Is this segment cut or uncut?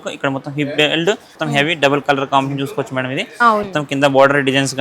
cut